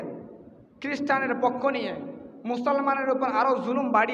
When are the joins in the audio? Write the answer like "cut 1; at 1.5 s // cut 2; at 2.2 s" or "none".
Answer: none